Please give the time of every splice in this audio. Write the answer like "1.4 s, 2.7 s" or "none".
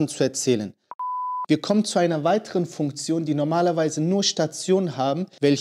1.2 s